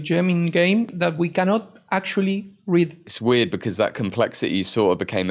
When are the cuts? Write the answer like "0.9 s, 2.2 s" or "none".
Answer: 0.9 s, 3.0 s